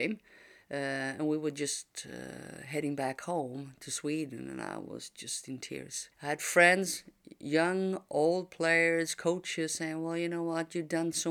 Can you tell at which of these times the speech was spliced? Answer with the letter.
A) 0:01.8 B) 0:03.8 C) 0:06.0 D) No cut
C